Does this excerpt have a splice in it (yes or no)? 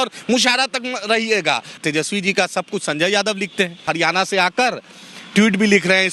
yes